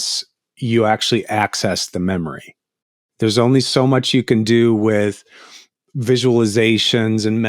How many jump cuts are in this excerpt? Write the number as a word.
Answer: one